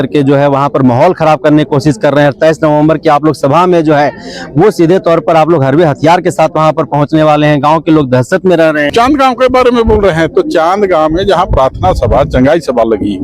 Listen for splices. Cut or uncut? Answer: cut